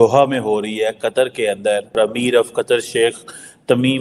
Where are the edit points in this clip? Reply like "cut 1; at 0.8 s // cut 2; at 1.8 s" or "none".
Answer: cut 1; at 2.0 s